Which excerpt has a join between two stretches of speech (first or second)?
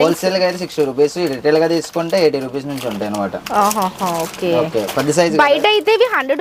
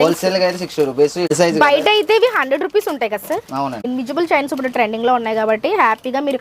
second